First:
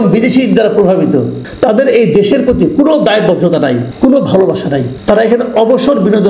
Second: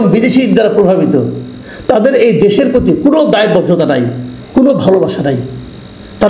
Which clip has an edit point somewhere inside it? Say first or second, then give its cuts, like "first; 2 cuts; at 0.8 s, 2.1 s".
first; 3 cuts; at 1.4 s, 3.9 s, 4.9 s